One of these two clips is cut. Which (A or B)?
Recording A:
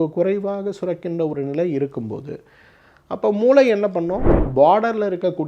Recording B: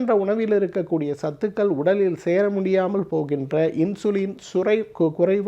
A